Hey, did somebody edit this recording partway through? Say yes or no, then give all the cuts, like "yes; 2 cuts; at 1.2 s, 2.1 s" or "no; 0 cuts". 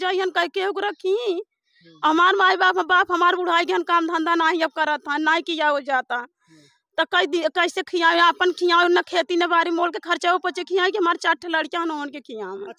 no; 0 cuts